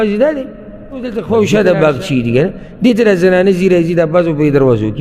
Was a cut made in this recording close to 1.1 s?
yes; 1 cut; at 1.1 s

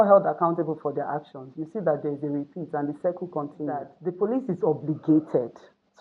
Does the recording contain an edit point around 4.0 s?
yes; 1 cut; at 4.0 s

